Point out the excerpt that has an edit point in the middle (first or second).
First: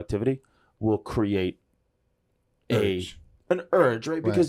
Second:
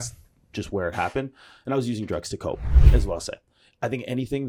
second